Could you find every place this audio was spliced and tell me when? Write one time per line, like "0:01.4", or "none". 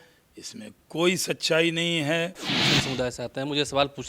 0:02.5